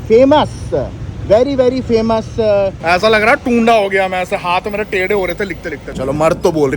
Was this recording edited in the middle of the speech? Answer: yes; 2 cuts; at 2.8 s, 5.9 s

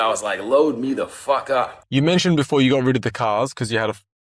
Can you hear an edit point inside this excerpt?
yes; 1 cut; at 1.8 s

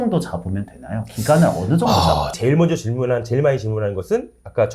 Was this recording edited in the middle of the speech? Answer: yes; 1 cut; at 2.3 s

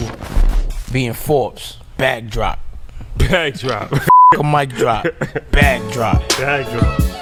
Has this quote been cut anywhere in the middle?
no; 0 cuts

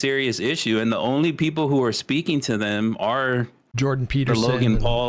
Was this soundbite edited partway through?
no; 0 cuts

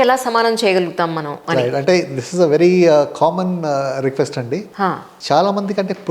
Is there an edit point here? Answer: yes; 1 cut; at 5.1 s

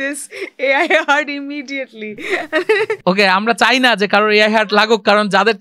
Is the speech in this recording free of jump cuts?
yes; 0 cuts

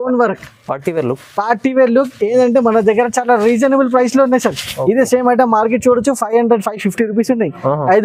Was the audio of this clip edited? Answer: no; 0 cuts

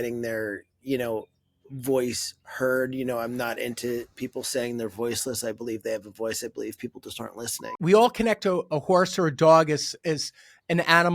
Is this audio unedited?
no; 1 cut; at 7.8 s

